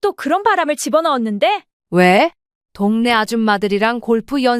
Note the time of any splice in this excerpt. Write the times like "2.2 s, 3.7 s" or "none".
1.7 s